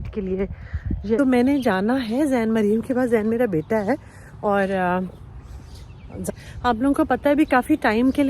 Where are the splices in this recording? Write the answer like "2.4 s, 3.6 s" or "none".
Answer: 1.2 s, 6.3 s